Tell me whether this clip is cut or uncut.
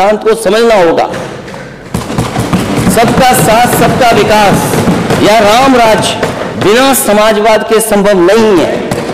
uncut